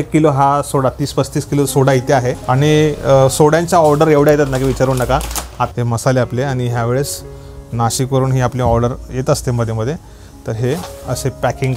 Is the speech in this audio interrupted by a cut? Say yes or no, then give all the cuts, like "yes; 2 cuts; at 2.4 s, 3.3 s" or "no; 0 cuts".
yes; 2 cuts; at 2.4 s, 5.7 s